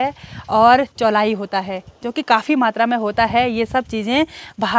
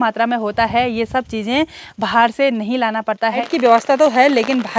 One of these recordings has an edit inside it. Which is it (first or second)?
second